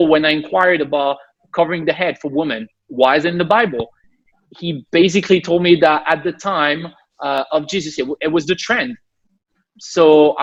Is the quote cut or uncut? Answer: uncut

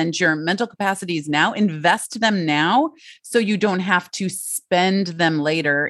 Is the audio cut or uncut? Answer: uncut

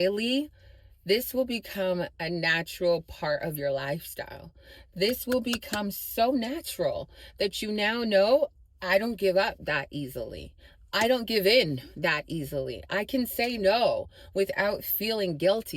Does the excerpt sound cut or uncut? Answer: uncut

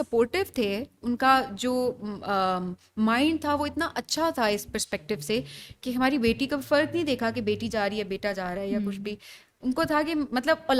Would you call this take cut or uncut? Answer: uncut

